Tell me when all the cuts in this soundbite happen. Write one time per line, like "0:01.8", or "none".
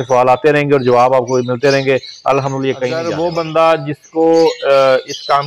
0:03.0